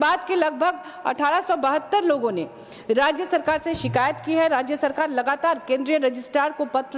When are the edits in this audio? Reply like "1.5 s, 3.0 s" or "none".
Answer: none